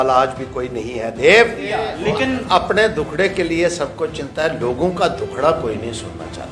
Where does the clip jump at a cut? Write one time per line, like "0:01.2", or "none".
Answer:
0:01.9